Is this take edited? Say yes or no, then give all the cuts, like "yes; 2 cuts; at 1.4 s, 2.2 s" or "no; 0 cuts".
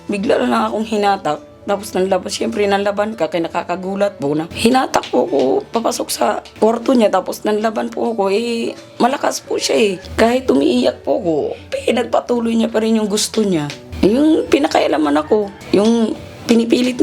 yes; 5 cuts; at 4.5 s, 6.5 s, 10.0 s, 13.8 s, 15.6 s